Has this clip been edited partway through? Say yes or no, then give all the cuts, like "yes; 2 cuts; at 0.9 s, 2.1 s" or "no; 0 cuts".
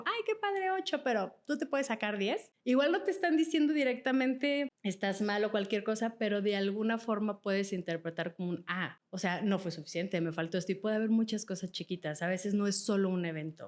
yes; 3 cuts; at 2.5 s, 4.8 s, 9.0 s